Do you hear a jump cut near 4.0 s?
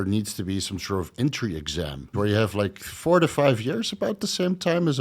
no; 1 cut; at 2.1 s

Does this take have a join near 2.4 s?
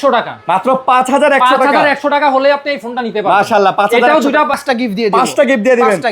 no; 1 cut; at 4.6 s

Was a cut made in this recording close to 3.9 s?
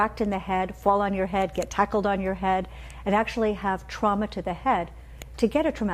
no; 1 cut; at 1.2 s

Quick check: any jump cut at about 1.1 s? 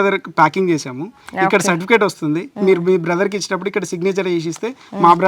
no; 0 cuts

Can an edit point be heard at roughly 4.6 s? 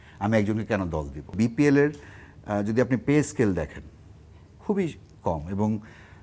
no; 1 cut; at 1.3 s

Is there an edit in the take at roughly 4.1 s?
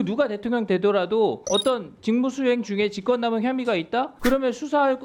yes; 2 cuts; at 1.4 s, 4.1 s

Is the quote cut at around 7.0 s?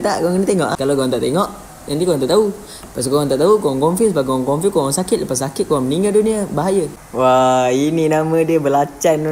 yes; 1 cut; at 7.0 s

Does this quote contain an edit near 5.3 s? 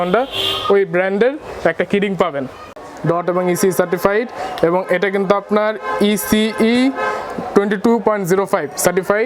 no; 1 cut; at 2.6 s

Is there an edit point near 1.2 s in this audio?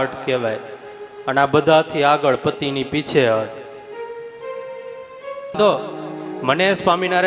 no; 1 cut; at 5.5 s

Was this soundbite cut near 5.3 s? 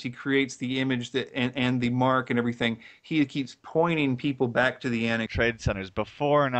no; 0 cuts

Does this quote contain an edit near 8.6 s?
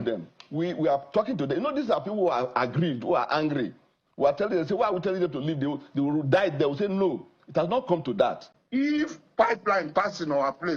yes; 1 cut; at 8.6 s

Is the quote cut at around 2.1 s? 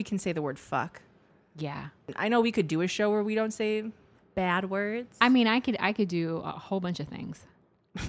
yes; 1 cut; at 2.1 s

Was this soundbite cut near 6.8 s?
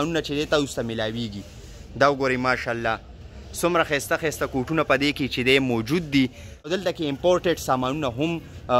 yes; 1 cut; at 6.8 s

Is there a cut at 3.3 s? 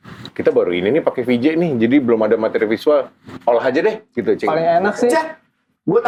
no; 0 cuts

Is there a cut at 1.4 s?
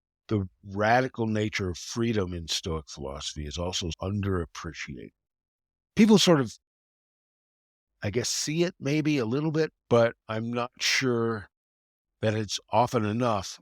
no; 2 cuts; at 4.0 s, 9.8 s

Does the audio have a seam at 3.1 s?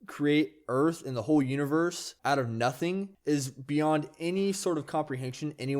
yes; 2 cuts; at 2.1 s, 3.1 s

